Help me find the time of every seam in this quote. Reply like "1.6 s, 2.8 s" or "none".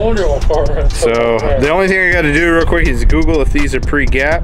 none